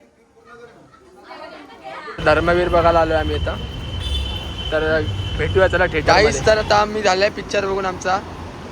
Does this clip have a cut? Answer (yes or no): yes